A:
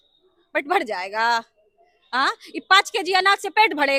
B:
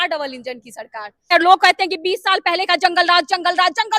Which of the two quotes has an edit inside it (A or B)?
B